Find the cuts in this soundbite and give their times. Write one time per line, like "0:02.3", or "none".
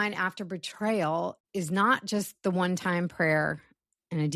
0:01.4